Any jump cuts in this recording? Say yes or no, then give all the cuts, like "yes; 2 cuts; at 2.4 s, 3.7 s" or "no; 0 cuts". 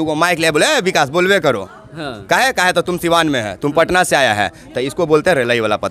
no; 0 cuts